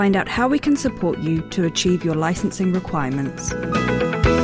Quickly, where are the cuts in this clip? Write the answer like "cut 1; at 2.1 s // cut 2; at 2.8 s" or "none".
cut 1; at 3.5 s